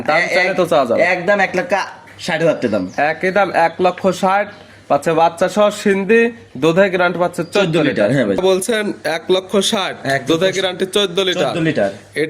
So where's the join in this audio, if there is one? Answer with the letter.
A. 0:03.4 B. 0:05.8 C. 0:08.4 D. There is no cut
C